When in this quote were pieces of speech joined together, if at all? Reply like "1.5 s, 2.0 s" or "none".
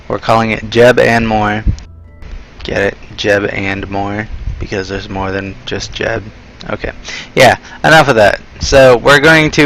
4.8 s